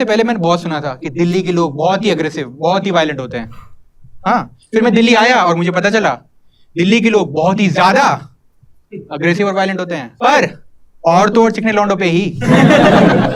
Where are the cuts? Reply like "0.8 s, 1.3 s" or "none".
10.1 s